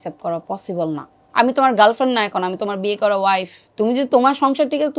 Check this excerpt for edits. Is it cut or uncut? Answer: cut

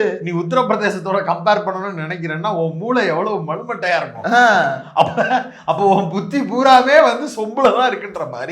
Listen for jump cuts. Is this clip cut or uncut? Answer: uncut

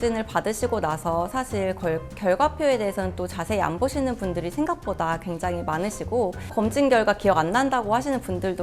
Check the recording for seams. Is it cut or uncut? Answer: uncut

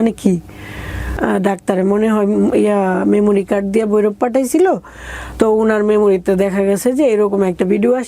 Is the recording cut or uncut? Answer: cut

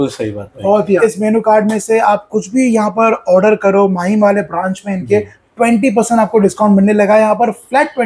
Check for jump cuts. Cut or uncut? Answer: cut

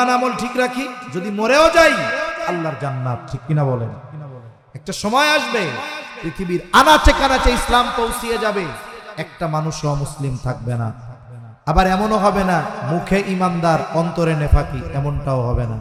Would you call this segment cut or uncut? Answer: uncut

